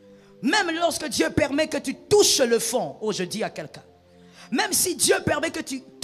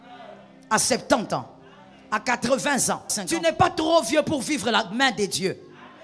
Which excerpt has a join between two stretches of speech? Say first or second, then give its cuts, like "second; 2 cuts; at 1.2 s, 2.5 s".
second; 1 cut; at 3.3 s